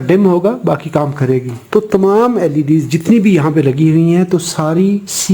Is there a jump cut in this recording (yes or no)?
yes